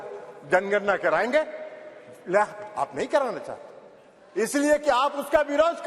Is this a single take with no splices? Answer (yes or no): yes